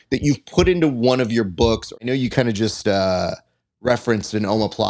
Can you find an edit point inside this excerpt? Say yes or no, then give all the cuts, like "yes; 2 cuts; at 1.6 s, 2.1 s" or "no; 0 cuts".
yes; 1 cut; at 2.0 s